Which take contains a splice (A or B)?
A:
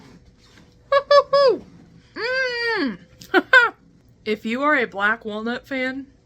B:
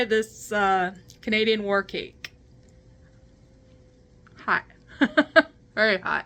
A